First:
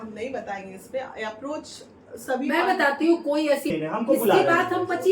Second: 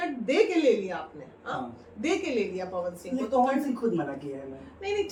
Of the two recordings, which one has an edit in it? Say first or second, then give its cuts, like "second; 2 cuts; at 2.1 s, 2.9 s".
first; 1 cut; at 3.7 s